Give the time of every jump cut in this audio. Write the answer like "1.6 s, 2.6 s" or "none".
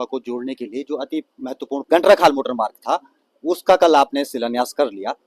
1.8 s